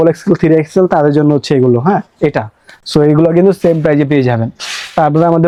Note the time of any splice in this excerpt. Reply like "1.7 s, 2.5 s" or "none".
none